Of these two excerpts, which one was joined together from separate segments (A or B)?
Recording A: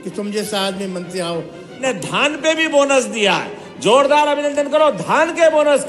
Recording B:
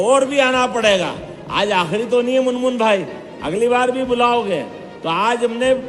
A